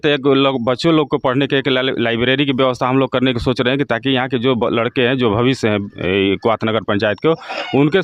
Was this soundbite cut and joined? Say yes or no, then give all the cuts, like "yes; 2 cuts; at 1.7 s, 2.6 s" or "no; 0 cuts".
no; 0 cuts